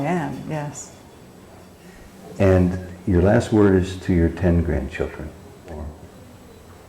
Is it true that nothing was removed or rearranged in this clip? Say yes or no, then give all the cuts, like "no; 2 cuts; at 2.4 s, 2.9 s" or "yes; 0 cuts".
no; 2 cuts; at 1.8 s, 6.0 s